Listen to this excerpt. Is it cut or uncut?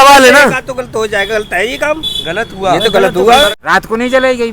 cut